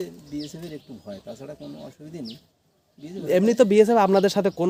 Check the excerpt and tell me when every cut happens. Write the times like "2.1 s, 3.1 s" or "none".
none